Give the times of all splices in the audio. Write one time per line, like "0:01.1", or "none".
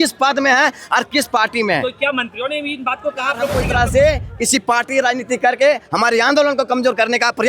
0:03.6